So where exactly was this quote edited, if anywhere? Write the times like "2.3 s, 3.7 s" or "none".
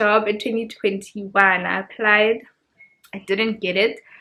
none